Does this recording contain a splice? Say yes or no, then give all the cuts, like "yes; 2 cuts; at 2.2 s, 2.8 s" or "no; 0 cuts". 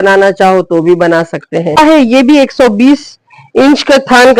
yes; 1 cut; at 1.8 s